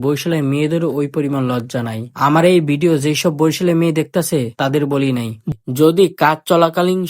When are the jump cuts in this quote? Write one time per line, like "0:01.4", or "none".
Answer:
0:05.5